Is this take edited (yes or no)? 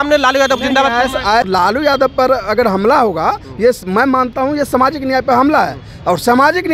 yes